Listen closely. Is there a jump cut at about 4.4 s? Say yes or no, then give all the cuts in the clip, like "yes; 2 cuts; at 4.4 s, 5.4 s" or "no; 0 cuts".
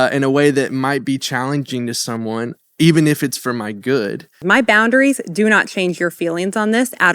yes; 1 cut; at 4.4 s